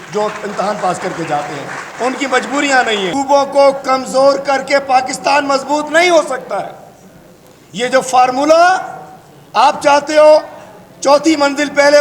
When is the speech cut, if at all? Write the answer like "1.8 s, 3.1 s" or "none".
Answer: 3.1 s